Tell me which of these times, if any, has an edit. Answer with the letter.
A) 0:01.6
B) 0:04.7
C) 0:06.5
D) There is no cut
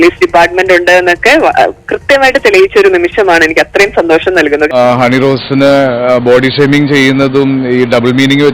B